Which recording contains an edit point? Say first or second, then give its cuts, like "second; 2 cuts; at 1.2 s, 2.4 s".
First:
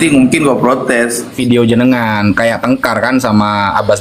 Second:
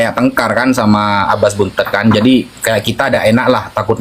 first; 1 cut; at 1.4 s